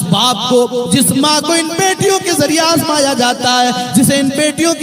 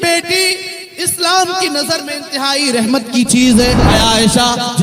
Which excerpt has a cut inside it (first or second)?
second